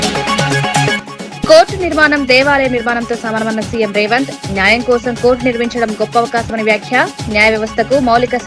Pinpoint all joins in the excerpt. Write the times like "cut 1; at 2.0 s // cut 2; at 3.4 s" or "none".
cut 1; at 0.9 s